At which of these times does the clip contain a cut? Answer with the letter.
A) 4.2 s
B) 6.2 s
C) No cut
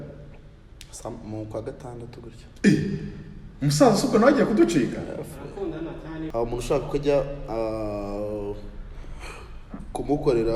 B